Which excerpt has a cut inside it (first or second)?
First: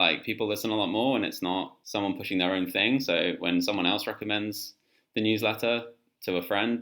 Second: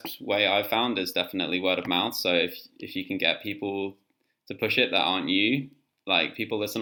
first